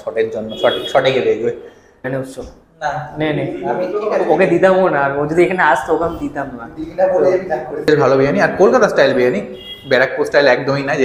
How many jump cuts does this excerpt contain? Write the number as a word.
two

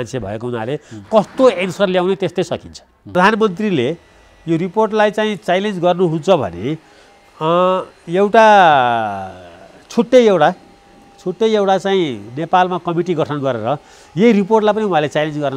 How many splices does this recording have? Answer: one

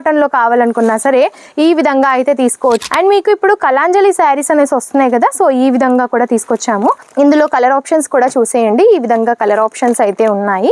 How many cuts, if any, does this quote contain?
two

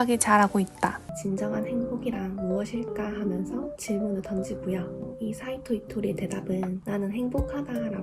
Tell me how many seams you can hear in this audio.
one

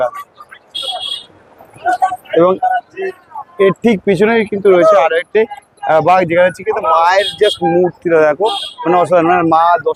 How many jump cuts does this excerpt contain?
zero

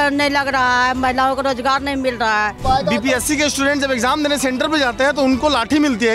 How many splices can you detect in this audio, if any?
one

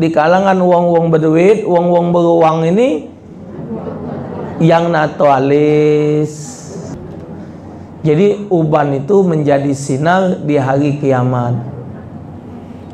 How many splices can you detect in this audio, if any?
one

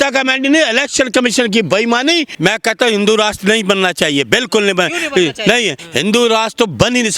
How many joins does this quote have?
two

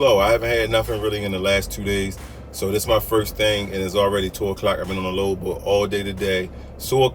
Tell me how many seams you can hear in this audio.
zero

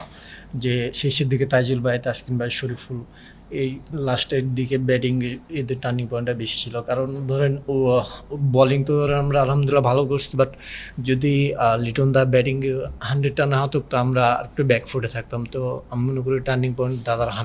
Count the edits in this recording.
zero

